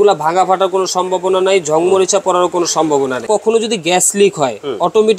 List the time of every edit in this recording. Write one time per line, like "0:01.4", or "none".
0:03.3